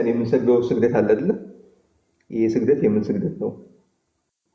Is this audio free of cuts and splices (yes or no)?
yes